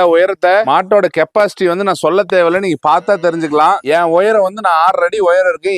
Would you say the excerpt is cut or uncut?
cut